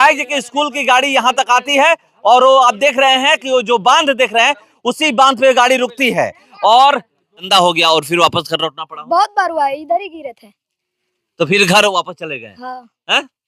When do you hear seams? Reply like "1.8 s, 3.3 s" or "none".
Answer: 7.5 s